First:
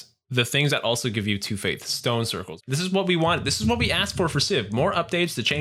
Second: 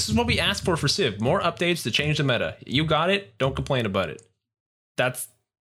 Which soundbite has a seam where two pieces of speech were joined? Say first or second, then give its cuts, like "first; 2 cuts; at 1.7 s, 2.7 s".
first; 1 cut; at 2.6 s